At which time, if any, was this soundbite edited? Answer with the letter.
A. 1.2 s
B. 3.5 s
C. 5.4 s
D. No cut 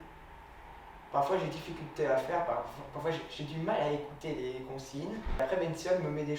C